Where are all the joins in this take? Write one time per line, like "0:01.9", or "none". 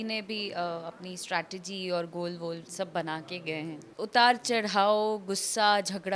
0:03.8